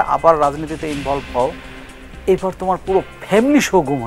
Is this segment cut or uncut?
uncut